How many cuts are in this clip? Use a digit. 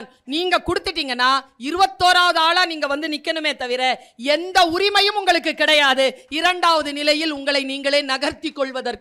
0